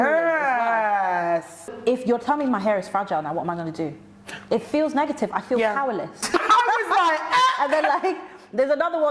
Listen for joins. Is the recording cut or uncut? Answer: cut